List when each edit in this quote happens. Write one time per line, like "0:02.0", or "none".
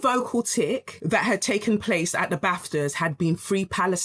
0:00.9